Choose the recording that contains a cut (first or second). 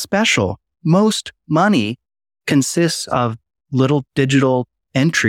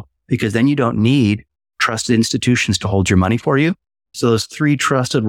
second